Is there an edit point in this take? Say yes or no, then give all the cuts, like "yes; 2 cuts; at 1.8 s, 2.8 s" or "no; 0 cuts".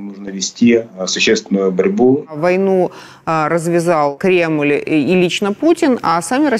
yes; 2 cuts; at 2.4 s, 4.1 s